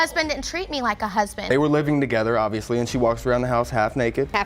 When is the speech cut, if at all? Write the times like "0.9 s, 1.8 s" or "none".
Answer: 1.4 s